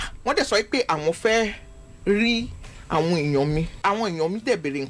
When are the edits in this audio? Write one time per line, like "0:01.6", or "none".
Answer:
0:03.8